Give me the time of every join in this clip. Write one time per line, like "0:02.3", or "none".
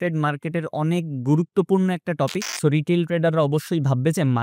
0:02.5